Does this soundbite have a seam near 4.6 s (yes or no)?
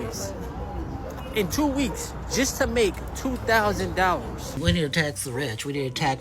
yes